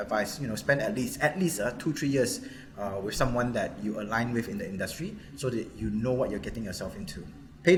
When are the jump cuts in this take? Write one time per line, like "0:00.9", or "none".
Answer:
none